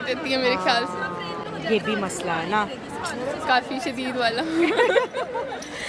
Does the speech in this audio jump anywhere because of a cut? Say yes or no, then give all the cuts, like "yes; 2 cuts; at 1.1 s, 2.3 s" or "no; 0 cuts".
no; 0 cuts